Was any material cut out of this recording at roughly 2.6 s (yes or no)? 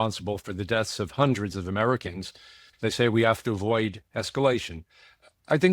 yes